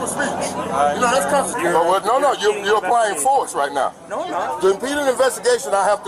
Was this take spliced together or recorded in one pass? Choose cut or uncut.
cut